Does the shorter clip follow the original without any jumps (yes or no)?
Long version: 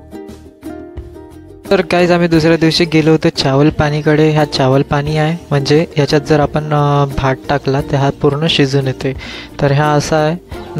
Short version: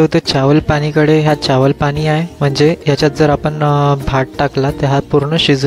yes